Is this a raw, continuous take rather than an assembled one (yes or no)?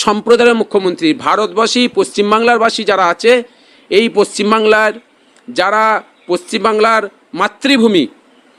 yes